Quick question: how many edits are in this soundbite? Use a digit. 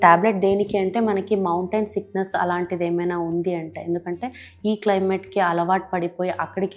0